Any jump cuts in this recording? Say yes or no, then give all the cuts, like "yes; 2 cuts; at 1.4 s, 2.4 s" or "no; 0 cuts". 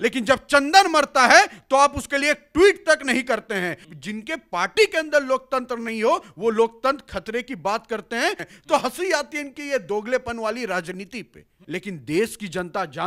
yes; 3 cuts; at 3.9 s, 8.5 s, 11.6 s